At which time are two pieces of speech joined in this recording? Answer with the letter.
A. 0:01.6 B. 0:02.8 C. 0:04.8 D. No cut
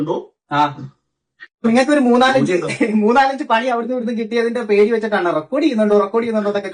D